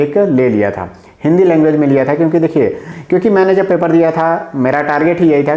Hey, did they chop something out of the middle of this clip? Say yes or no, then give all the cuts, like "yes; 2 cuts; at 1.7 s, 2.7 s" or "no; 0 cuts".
yes; 1 cut; at 2.9 s